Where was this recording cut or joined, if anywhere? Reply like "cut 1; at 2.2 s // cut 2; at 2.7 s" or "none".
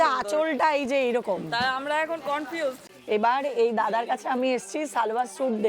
cut 1; at 2.9 s